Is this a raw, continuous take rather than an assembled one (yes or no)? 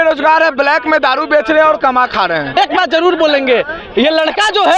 no